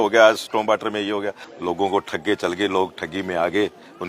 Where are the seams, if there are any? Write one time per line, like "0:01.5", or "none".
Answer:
0:01.4